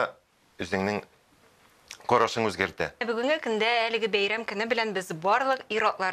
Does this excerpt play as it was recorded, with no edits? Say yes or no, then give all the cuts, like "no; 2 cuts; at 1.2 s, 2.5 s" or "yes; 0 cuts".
no; 1 cut; at 3.0 s